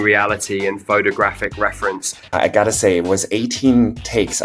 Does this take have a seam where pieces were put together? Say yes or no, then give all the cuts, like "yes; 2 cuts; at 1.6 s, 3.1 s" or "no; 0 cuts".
yes; 1 cut; at 2.3 s